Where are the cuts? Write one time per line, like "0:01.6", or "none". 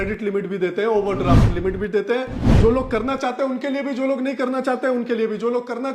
0:02.5